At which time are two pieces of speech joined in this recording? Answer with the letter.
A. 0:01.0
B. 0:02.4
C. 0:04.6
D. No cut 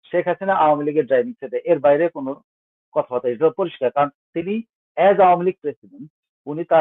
D